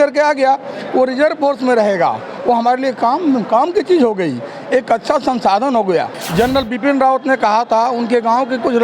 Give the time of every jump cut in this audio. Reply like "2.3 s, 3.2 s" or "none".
6.2 s